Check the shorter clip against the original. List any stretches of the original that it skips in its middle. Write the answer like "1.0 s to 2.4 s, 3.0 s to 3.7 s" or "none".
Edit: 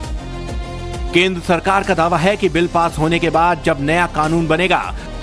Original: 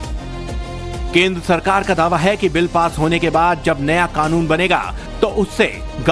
none